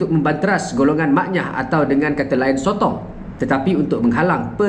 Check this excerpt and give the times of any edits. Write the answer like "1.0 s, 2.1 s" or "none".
none

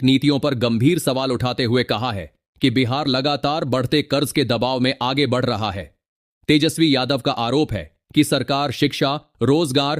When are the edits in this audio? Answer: none

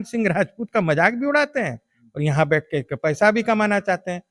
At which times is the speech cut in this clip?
none

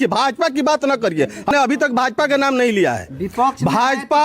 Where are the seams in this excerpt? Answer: 1.5 s

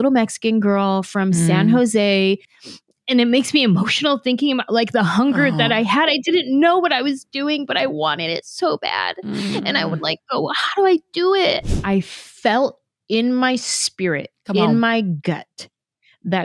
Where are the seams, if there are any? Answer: 2.5 s, 11.6 s

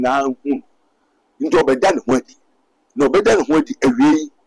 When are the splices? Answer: none

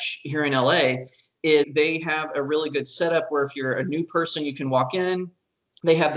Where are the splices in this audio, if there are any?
1.7 s

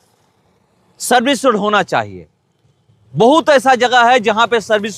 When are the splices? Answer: none

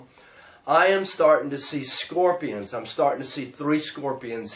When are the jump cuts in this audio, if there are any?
3.3 s

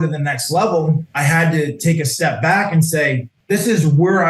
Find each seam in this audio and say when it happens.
3.3 s

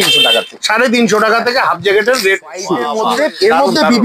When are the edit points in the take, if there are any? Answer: 2.9 s

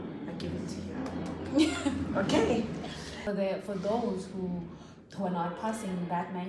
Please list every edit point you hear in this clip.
3.2 s

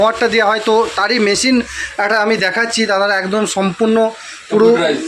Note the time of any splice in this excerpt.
none

